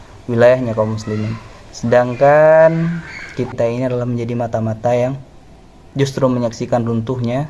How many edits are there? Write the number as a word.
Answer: one